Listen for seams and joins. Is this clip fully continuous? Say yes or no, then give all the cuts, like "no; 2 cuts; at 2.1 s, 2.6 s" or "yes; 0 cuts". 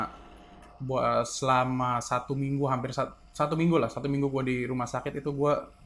yes; 0 cuts